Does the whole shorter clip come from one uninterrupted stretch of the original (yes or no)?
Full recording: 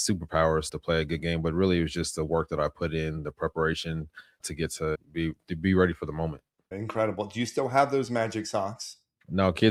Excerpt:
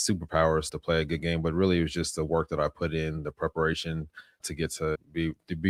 yes